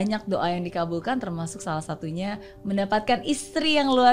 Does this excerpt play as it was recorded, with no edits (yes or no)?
yes